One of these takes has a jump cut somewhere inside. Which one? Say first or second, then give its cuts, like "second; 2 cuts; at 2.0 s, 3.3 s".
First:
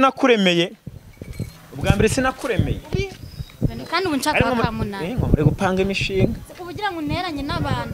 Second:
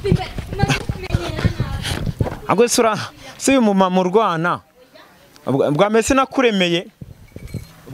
first; 1 cut; at 2.9 s